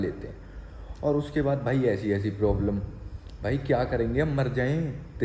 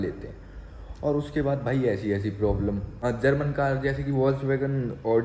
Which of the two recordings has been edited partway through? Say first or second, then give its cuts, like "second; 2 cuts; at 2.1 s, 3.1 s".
second; 1 cut; at 2.9 s